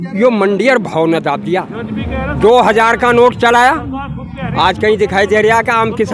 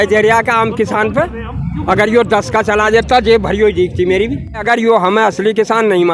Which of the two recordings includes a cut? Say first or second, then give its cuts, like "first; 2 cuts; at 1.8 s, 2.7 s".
second; 1 cut; at 4.6 s